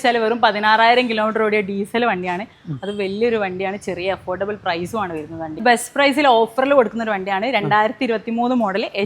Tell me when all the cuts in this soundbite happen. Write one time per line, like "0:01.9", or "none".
0:05.6